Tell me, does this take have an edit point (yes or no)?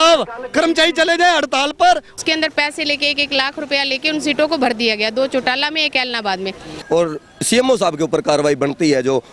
yes